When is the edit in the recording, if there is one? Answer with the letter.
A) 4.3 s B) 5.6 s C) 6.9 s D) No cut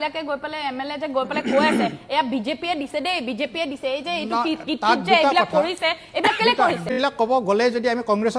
C